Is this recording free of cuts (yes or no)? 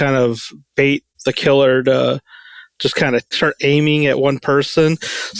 no